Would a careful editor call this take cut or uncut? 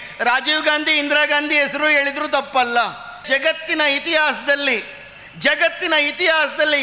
cut